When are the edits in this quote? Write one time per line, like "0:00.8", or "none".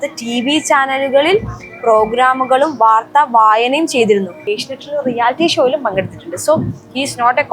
0:04.4